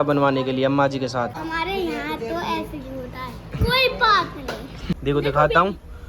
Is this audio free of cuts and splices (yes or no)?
no